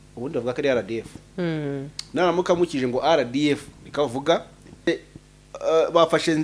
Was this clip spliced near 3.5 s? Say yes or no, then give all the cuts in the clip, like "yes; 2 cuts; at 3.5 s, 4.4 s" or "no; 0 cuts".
no; 1 cut; at 4.9 s